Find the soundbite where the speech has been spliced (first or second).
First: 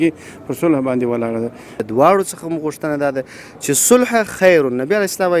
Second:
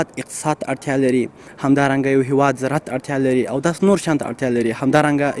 first